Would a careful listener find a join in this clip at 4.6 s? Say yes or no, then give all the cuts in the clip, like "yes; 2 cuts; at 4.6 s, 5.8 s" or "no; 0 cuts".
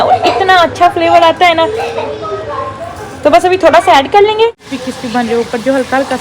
yes; 1 cut; at 4.6 s